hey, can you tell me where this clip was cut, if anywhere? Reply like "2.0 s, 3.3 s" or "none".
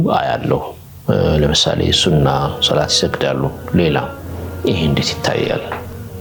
none